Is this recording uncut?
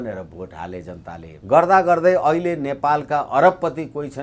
no; 1 cut; at 1.3 s

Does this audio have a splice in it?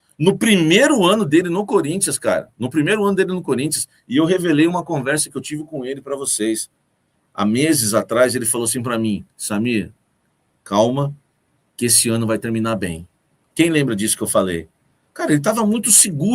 no; 0 cuts

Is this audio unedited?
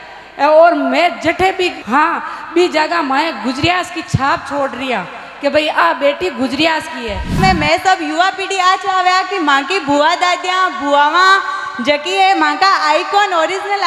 no; 2 cuts; at 1.8 s, 7.4 s

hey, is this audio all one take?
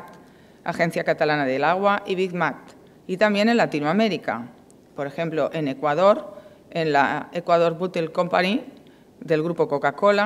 no; 1 cut; at 5.1 s

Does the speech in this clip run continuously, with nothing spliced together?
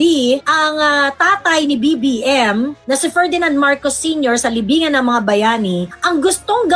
yes; 0 cuts

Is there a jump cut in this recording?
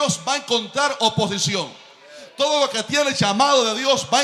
no; 0 cuts

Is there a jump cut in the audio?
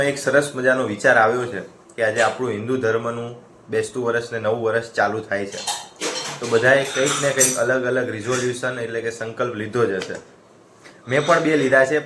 no; 0 cuts

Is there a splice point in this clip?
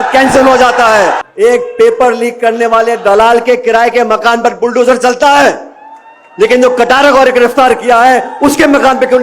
yes; 1 cut; at 1.2 s

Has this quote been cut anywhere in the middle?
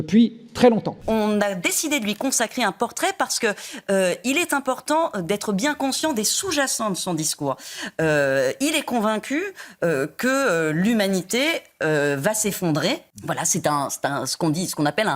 yes; 2 cuts; at 1.0 s, 13.1 s

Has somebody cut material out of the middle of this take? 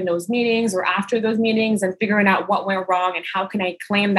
no; 0 cuts

